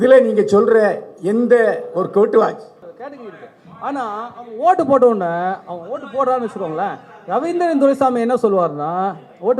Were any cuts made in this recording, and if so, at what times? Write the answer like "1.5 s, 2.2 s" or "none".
2.9 s